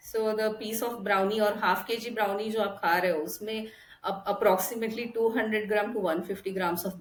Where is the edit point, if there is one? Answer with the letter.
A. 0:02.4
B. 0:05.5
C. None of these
C